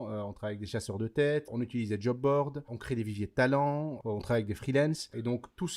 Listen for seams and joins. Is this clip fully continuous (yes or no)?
no